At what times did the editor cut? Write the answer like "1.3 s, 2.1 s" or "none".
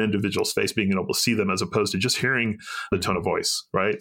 2.9 s